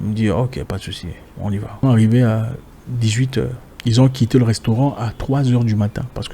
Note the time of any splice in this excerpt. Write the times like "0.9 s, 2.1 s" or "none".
1.8 s, 3.7 s